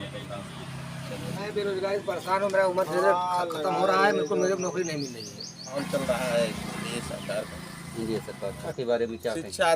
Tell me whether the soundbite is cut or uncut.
cut